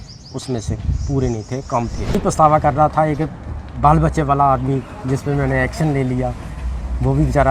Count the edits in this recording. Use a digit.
1